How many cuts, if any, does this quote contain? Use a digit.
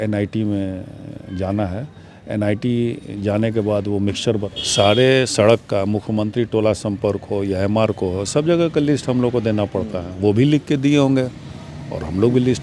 1